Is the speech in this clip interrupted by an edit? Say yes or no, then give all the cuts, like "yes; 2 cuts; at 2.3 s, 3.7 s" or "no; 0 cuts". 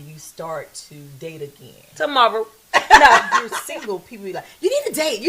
yes; 1 cut; at 3.6 s